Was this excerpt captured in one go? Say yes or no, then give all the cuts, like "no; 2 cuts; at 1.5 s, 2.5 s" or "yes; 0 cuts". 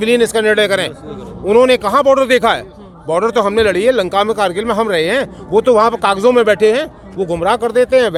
yes; 0 cuts